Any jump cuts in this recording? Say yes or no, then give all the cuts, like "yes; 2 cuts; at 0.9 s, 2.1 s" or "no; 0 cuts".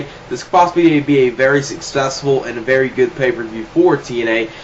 no; 0 cuts